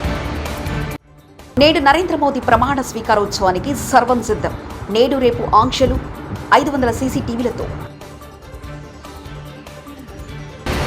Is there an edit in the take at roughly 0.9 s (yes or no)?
yes